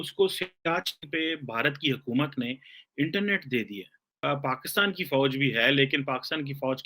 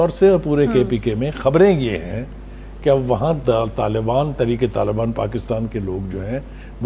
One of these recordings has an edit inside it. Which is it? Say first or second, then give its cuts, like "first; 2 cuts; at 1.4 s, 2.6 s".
first; 1 cut; at 4.2 s